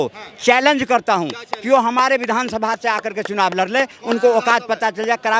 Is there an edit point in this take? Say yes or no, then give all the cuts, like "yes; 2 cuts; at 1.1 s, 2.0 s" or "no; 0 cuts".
no; 0 cuts